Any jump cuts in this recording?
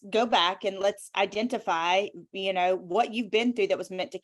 no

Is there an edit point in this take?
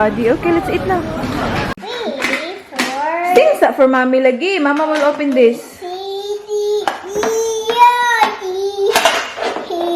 yes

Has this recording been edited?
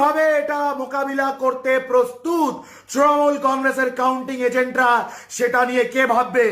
no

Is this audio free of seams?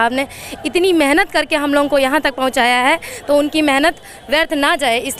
yes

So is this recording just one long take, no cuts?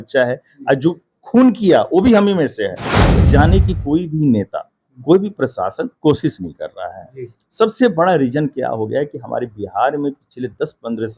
no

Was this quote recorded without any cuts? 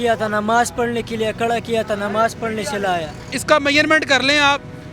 no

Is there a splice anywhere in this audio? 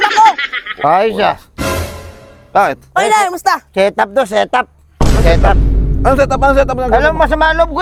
no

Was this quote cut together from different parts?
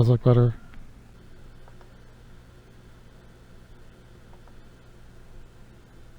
yes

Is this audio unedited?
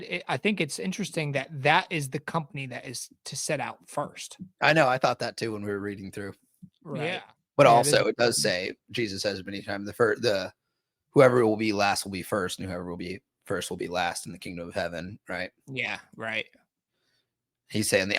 no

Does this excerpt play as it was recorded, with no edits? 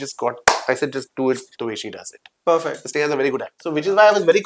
no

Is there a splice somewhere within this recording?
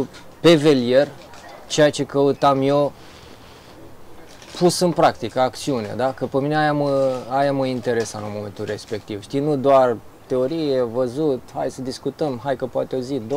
no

